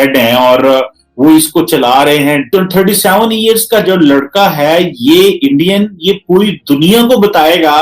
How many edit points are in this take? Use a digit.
1